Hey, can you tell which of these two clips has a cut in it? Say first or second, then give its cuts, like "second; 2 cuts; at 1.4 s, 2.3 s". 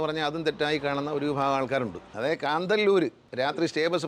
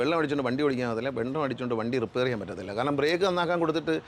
first; 2 cuts; at 2.0 s, 3.2 s